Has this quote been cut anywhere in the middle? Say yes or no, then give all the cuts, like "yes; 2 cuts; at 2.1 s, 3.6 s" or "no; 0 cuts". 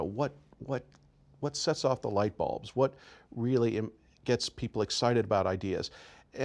no; 0 cuts